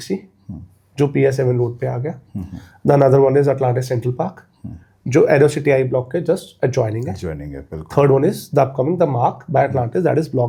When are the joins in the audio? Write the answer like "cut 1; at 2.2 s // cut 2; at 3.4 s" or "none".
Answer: none